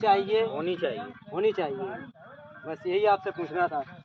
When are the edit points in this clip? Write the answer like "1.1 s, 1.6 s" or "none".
none